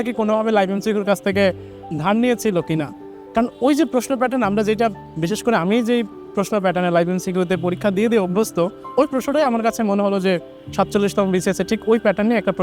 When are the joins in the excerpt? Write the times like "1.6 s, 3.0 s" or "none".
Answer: none